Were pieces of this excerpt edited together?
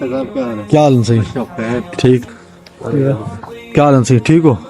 yes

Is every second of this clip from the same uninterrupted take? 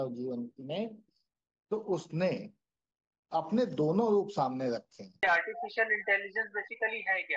no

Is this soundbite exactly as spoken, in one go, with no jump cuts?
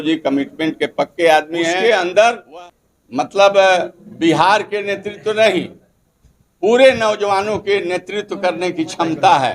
no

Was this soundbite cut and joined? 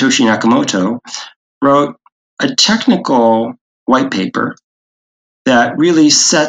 no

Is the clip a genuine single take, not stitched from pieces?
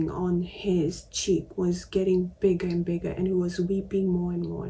yes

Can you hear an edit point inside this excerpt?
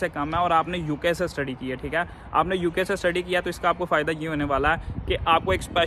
no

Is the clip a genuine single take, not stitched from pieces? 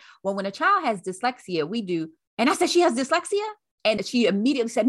no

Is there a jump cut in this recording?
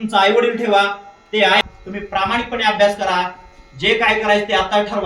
yes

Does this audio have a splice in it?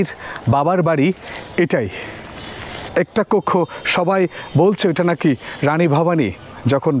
yes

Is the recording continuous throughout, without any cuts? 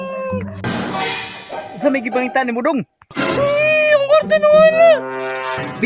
yes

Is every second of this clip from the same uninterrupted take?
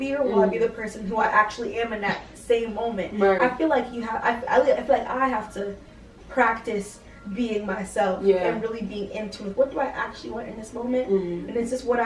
yes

